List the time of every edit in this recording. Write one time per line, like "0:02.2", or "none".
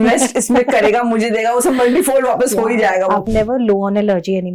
0:03.3